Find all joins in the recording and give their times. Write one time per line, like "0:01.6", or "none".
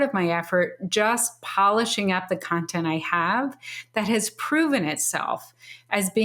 none